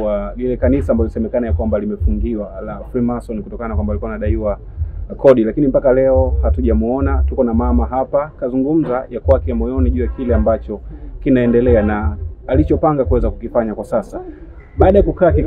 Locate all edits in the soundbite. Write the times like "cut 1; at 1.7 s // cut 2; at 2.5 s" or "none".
none